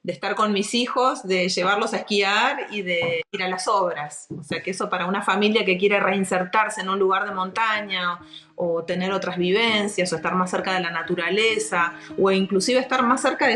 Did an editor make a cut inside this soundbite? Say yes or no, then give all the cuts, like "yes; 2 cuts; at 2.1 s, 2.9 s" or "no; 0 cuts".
no; 0 cuts